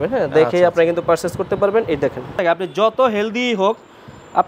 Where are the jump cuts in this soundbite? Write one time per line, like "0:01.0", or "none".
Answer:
0:02.4